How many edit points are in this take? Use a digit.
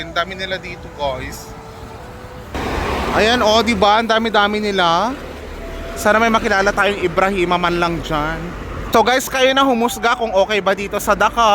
1